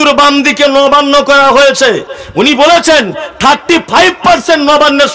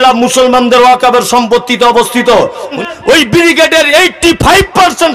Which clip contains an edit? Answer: second; 1 cut; at 2.8 s

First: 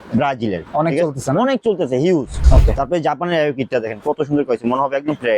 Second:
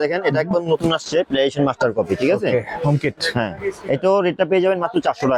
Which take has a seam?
first; 1 cut; at 2.4 s

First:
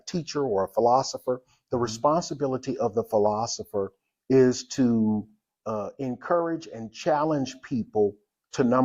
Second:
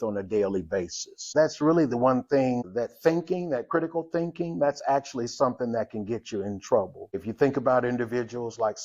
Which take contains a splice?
second; 3 cuts; at 1.3 s, 2.7 s, 7.2 s

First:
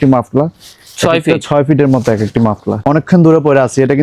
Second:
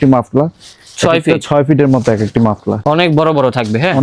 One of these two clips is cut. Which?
first; 1 cut; at 2.7 s

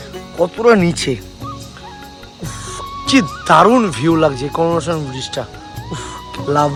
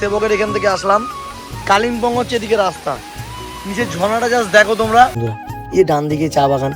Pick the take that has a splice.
second; 1 cut; at 5.3 s

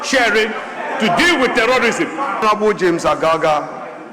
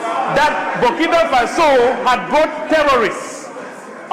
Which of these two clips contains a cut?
first; 1 cut; at 2.4 s

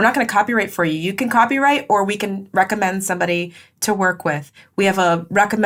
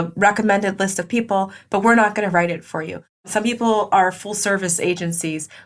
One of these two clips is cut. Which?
second; 1 cut; at 3.2 s

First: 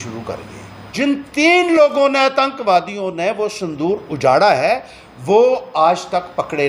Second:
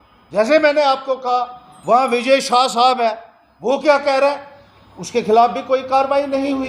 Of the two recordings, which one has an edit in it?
first; 1 cut; at 0.9 s

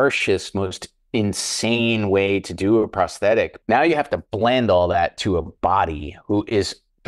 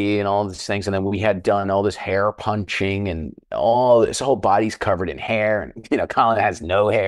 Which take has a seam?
first; 1 cut; at 3.6 s

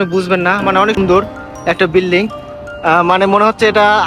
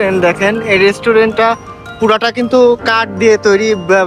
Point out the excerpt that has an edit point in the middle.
first; 1 cut; at 1.0 s

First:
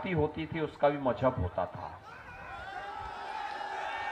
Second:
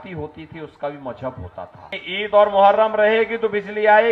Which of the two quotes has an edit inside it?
second; 1 cut; at 2.0 s

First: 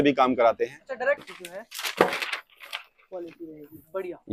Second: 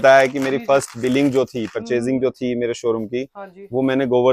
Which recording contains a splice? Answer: first; 1 cut; at 1.2 s

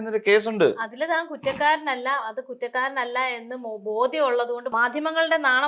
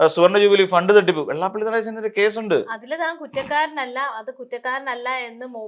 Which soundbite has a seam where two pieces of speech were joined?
first; 1 cut; at 4.7 s

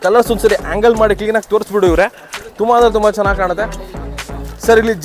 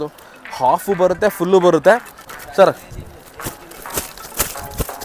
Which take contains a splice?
second; 1 cut; at 2.4 s

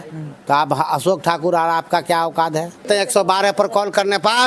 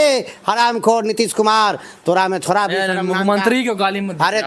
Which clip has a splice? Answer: first; 1 cut; at 2.8 s

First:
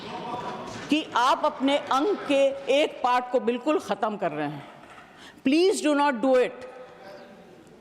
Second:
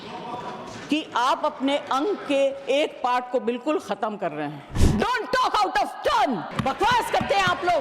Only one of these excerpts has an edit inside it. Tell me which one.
second; 2 cuts; at 4.7 s, 6.5 s

